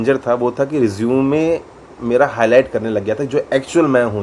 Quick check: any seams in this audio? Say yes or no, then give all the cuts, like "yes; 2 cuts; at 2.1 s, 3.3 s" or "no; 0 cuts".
no; 0 cuts